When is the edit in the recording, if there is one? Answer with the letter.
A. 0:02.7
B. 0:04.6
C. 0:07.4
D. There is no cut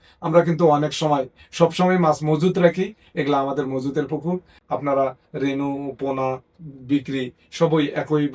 B